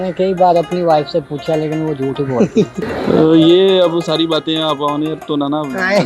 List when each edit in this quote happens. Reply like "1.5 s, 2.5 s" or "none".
2.8 s